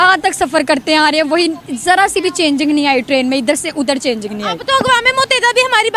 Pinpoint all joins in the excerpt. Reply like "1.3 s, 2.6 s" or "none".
none